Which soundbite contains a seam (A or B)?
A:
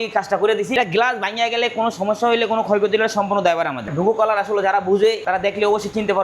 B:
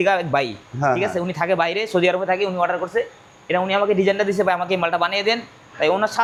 A